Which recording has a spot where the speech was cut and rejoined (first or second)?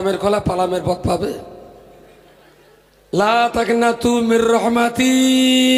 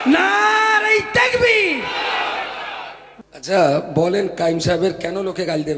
second